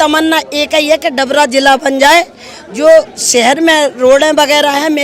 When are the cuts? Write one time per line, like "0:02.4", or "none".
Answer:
none